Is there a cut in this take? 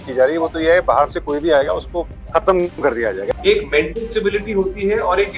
yes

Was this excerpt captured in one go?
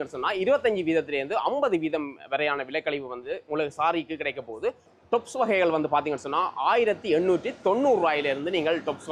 yes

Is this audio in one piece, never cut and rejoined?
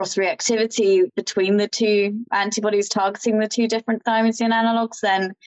yes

